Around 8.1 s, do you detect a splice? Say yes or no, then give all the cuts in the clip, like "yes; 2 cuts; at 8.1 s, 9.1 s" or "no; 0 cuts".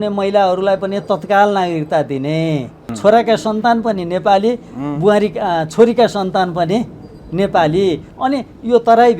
no; 1 cut; at 2.8 s